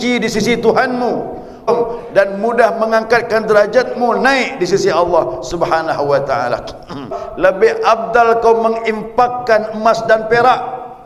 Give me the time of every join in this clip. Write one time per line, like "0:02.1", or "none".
0:01.7
0:07.2